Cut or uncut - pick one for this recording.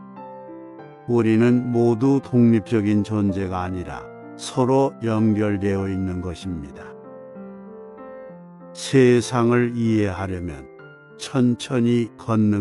cut